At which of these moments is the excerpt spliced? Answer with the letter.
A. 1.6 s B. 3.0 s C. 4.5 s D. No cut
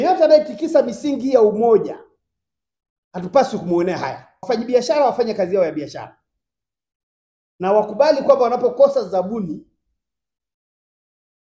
C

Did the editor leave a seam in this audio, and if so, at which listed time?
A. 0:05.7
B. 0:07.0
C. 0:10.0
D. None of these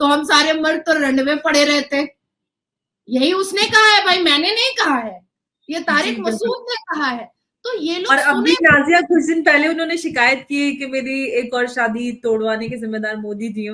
D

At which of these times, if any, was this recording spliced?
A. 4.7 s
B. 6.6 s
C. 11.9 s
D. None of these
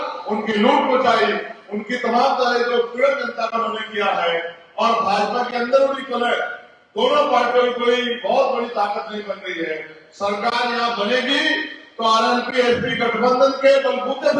D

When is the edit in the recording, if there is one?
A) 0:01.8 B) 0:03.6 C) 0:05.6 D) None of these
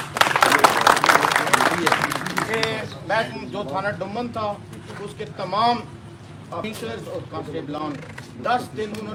D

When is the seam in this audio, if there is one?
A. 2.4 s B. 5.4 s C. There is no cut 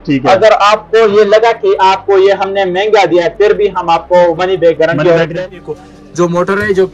B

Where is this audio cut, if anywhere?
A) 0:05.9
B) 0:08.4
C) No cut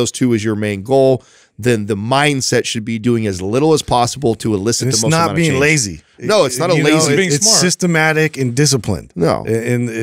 C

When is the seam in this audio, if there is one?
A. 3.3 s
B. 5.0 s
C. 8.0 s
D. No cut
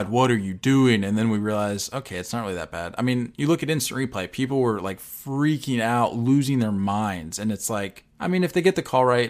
C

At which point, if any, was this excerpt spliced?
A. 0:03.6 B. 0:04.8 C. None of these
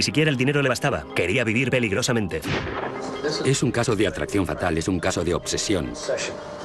B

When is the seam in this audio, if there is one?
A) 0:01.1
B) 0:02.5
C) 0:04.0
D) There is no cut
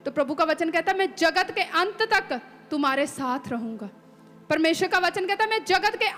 D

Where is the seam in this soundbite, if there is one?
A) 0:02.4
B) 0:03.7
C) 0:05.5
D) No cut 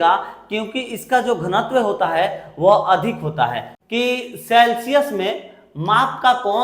B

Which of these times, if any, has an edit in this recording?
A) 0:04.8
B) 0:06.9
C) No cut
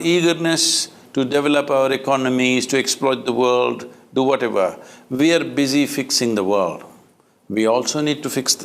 B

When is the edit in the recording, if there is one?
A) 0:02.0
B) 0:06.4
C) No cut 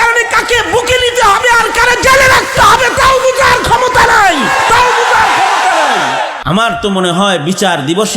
B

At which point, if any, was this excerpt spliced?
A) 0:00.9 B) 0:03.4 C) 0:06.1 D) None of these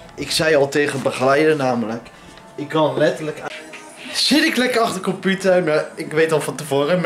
B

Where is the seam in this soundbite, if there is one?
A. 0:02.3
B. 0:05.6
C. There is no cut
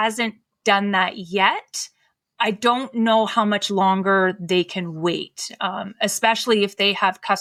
C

